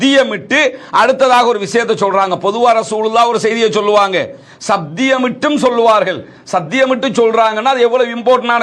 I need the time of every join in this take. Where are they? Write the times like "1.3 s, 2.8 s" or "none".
none

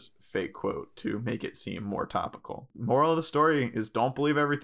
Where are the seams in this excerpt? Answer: 2.7 s

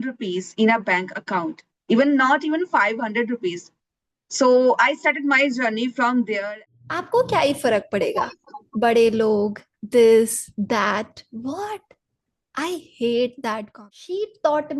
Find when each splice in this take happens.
6.6 s, 13.7 s

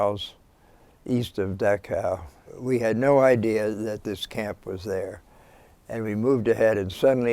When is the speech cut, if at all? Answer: 2.5 s

